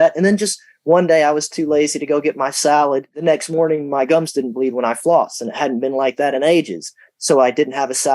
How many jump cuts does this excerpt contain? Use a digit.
1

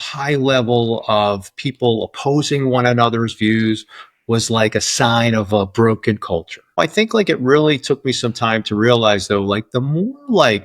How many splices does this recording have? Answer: 1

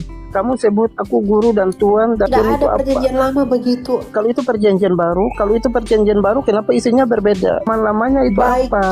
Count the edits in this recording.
3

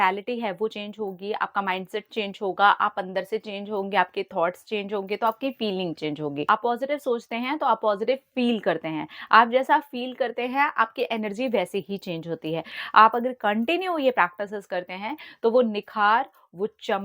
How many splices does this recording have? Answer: 2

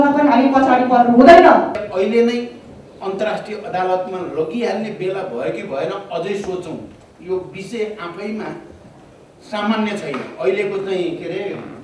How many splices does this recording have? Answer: 1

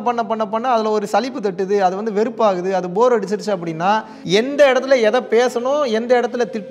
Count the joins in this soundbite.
1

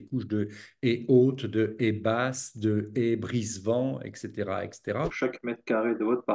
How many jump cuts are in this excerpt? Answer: 1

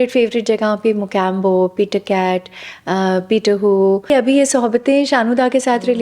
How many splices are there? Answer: 1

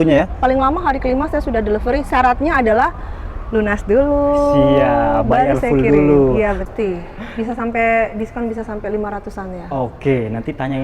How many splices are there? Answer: 1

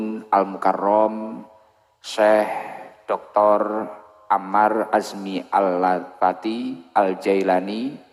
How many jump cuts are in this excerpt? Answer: 0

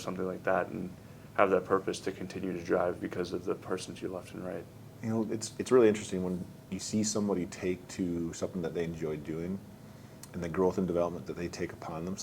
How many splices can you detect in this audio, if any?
1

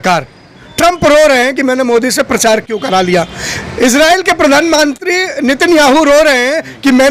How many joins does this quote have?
0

